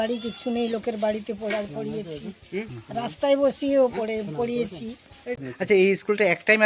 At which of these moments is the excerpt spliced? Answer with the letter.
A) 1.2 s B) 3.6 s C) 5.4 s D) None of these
C